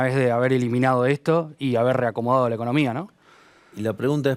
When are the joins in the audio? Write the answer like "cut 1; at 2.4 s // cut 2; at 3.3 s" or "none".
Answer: none